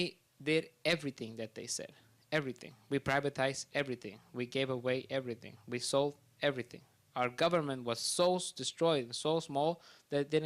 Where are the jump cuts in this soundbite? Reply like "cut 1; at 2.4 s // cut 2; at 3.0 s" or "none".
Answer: cut 1; at 1.8 s